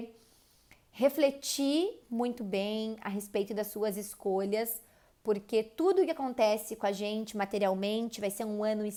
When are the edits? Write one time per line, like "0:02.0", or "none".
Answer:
none